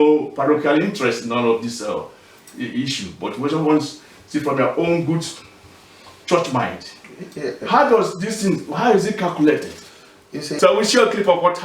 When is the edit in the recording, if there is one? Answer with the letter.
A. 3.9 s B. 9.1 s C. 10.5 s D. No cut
C